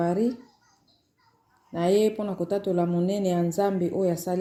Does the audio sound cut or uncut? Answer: uncut